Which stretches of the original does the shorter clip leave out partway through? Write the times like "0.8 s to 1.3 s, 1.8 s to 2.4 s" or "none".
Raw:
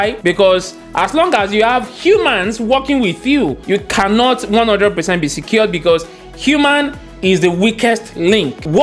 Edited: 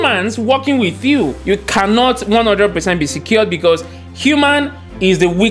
none